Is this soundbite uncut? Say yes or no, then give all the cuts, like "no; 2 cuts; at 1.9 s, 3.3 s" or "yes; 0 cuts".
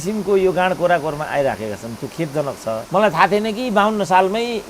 no; 1 cut; at 2.8 s